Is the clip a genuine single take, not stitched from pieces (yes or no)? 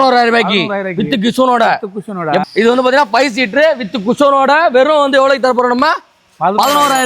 no